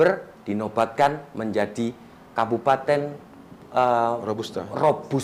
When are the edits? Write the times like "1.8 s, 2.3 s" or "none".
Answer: none

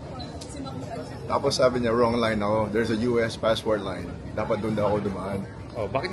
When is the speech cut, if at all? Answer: none

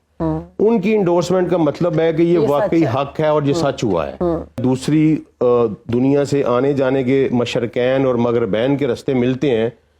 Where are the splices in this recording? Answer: 4.6 s

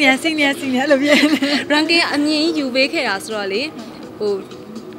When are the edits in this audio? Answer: none

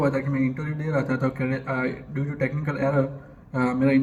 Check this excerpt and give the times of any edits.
none

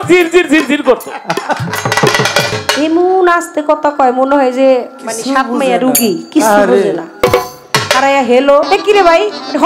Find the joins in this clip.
2.6 s, 8.7 s

